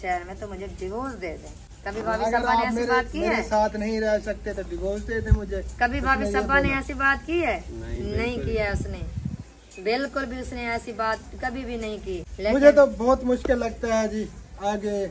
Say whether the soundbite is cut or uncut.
uncut